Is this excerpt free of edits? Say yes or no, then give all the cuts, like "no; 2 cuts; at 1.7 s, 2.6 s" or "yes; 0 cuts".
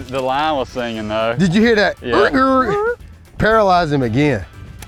yes; 0 cuts